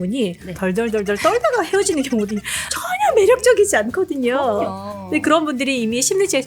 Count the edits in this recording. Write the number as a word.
zero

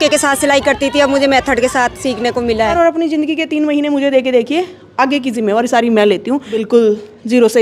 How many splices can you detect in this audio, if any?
two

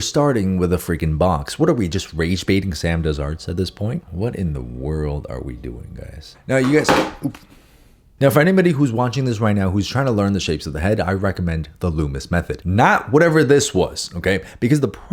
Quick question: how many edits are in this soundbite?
zero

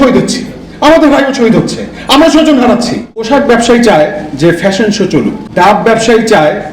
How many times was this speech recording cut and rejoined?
two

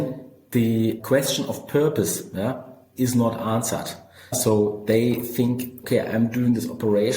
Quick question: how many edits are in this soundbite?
four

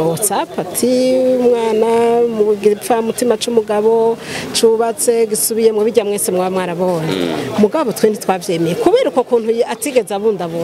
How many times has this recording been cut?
zero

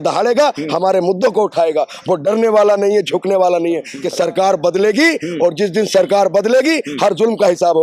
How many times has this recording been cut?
one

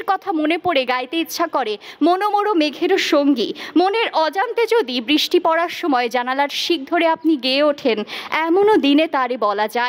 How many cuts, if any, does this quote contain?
zero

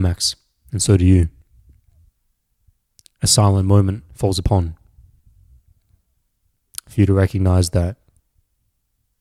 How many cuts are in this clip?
zero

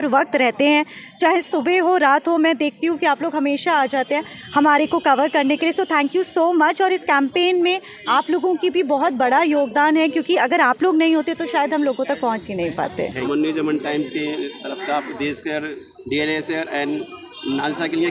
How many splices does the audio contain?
one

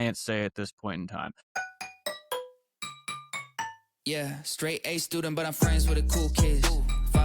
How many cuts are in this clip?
one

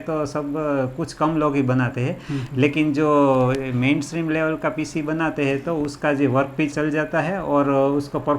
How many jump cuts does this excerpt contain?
one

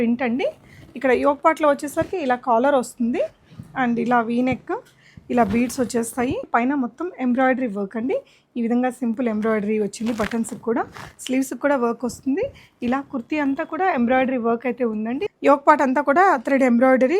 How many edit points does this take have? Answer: two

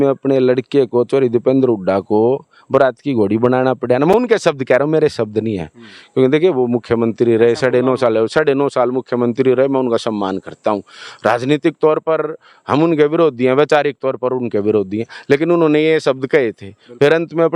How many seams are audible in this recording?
zero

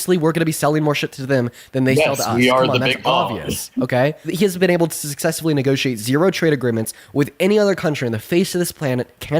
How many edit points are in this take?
one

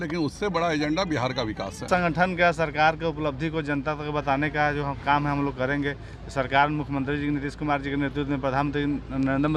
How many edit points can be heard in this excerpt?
one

